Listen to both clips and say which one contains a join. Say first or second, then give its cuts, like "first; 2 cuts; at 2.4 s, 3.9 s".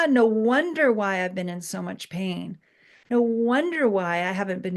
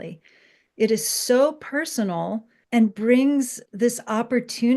second; 2 cuts; at 2.5 s, 3.6 s